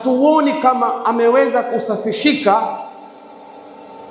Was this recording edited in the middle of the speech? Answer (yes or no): no